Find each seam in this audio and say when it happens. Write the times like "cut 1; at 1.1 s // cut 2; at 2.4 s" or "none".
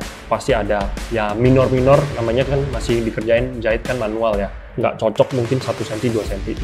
cut 1; at 1.0 s // cut 2; at 4.6 s